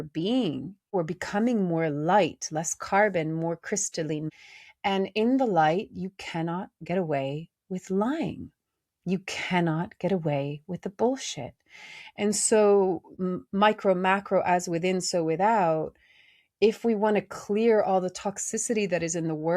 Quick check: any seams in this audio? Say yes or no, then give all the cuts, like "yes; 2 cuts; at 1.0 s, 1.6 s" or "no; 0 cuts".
yes; 2 cuts; at 0.9 s, 4.3 s